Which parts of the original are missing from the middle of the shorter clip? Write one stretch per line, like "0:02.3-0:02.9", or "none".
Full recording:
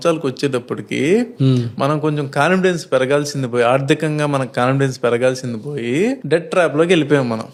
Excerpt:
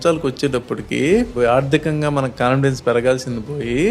0:01.3-0:03.5